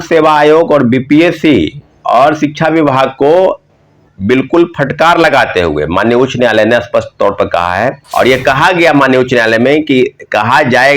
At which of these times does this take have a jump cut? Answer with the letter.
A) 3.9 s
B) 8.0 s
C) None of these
B